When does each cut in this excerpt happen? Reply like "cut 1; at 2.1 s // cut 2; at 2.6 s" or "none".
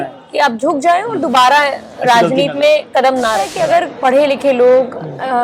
cut 1; at 3.5 s